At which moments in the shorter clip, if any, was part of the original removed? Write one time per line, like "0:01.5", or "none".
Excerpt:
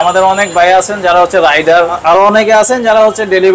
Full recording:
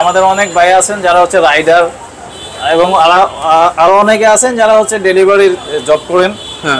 0:02.0